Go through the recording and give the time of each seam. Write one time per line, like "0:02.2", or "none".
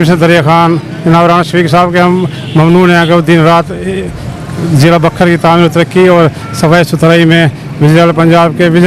none